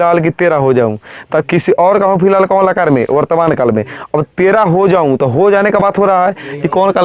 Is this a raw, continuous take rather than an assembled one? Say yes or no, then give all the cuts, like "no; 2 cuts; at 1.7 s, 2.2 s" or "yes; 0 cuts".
yes; 0 cuts